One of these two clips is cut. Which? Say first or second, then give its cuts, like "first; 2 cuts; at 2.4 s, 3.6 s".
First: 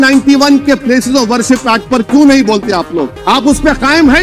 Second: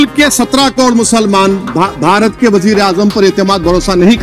first; 1 cut; at 3.1 s